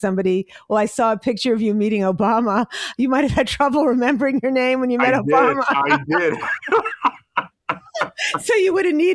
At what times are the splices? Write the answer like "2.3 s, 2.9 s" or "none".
none

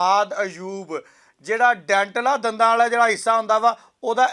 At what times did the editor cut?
none

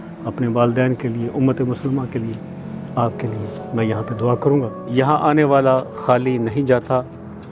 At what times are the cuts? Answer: 4.8 s

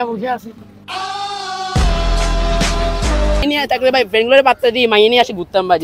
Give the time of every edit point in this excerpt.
3.4 s

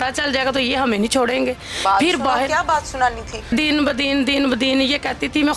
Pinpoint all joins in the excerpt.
3.5 s

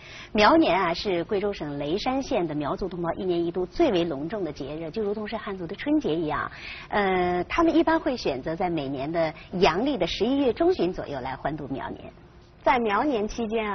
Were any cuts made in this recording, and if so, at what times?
6.7 s

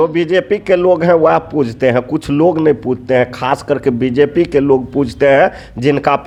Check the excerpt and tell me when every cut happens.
none

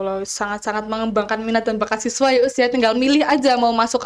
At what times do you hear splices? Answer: none

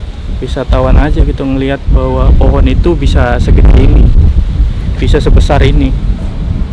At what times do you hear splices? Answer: none

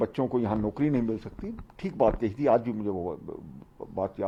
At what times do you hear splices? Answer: none

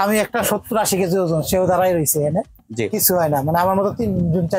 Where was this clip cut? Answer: none

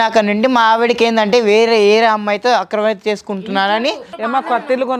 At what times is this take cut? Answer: 4.1 s

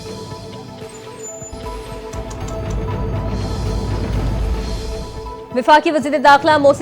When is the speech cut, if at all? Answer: 1.1 s

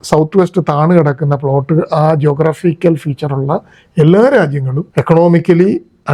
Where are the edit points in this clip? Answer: none

